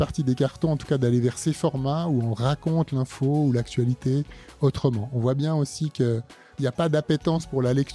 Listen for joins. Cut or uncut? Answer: cut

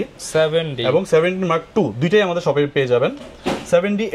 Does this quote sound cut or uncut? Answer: uncut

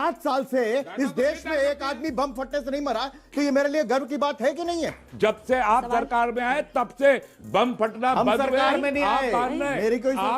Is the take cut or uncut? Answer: cut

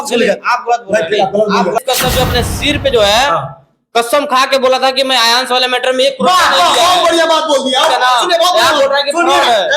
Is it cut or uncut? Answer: cut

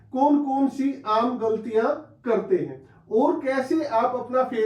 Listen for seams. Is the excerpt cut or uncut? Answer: uncut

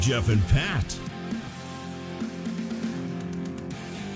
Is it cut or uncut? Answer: cut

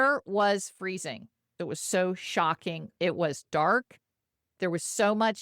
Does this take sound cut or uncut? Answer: cut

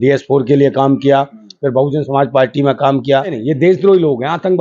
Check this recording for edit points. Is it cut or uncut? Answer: cut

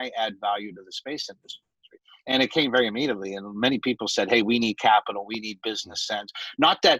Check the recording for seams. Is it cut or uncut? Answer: uncut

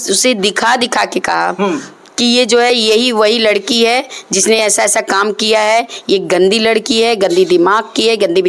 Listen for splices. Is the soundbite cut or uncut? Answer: uncut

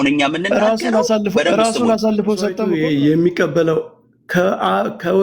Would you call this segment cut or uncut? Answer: cut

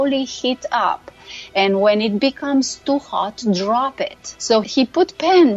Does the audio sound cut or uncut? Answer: cut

